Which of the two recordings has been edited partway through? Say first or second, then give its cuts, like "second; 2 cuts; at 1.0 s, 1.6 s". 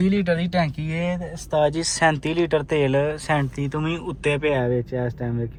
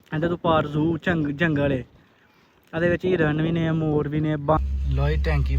second; 1 cut; at 4.6 s